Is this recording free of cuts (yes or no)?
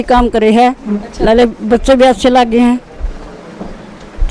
yes